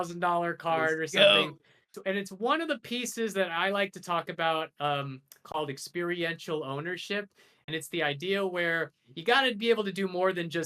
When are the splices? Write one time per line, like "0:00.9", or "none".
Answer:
0:01.9